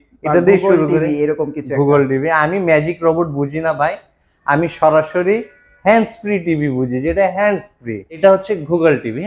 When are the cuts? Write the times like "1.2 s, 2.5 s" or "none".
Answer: 8.2 s